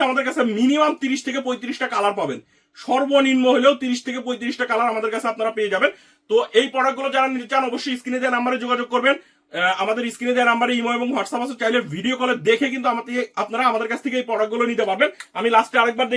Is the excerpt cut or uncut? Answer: uncut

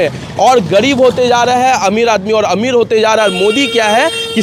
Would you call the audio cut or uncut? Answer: uncut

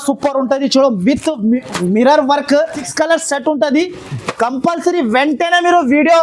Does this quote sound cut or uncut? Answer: cut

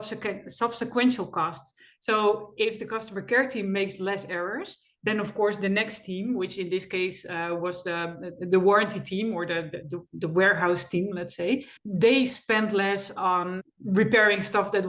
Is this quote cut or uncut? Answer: cut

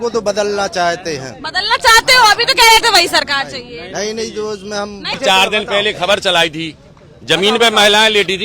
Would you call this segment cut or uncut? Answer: cut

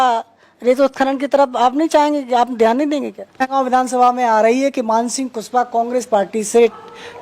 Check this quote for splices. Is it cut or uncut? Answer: cut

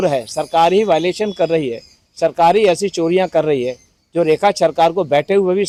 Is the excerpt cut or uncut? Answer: uncut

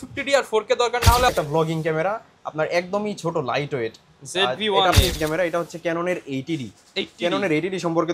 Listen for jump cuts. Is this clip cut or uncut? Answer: cut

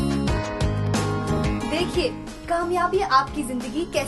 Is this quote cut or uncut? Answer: cut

